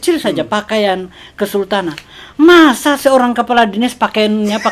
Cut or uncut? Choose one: uncut